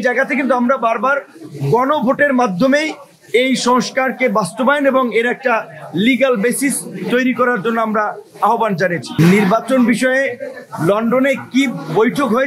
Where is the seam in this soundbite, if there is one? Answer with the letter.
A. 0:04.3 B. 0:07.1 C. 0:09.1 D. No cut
C